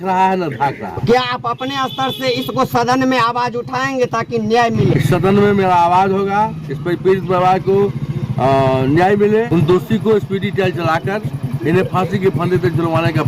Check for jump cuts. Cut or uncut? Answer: cut